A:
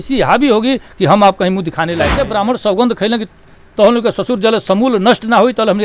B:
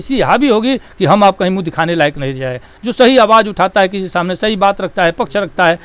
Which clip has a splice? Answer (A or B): A